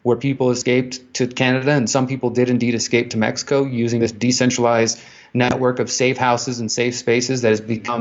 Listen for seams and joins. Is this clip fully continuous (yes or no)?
yes